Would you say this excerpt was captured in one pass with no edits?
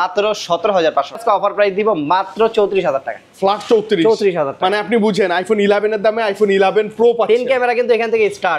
no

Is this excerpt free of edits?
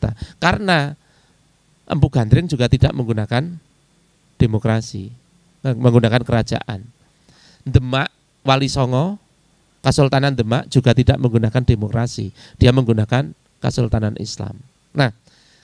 yes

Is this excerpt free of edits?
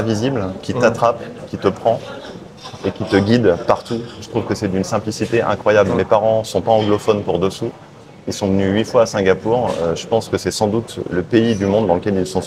yes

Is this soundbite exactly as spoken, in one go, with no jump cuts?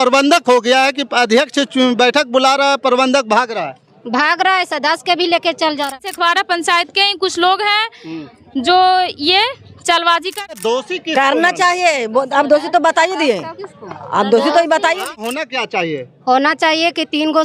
no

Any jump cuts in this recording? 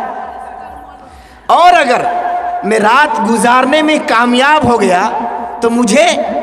no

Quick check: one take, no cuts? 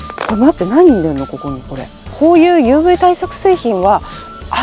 no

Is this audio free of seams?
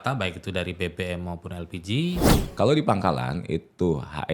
no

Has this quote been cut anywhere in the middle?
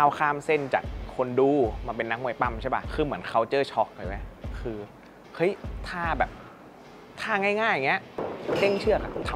no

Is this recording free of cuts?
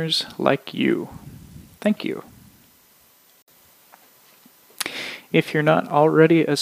no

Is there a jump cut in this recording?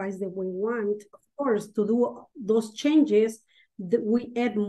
yes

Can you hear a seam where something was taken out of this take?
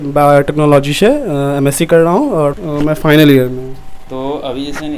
no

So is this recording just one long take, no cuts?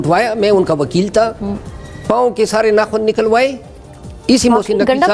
yes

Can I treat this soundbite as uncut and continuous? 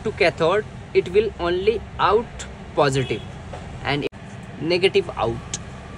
no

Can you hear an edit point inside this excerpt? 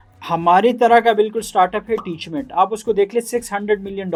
no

